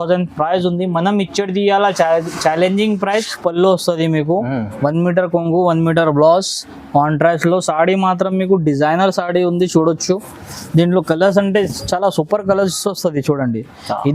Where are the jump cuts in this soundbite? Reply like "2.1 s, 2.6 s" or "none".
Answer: 3.3 s